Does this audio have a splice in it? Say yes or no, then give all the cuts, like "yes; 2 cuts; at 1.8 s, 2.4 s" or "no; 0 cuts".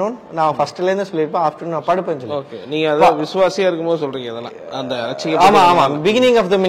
no; 0 cuts